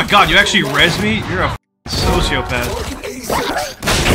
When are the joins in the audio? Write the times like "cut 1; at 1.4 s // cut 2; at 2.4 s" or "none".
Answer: none